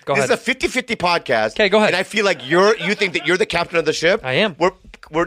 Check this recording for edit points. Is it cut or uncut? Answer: uncut